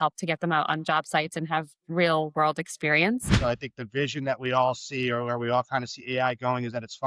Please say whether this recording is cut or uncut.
cut